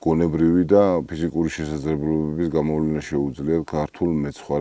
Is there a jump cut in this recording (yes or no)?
no